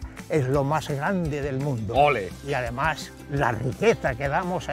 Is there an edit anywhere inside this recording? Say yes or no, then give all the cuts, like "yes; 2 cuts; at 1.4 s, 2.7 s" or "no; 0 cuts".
yes; 1 cut; at 2.4 s